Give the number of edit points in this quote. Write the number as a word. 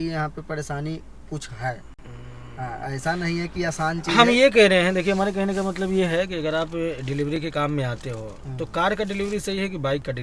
zero